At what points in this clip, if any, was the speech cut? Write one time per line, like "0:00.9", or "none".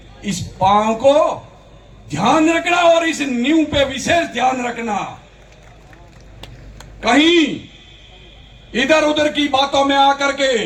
none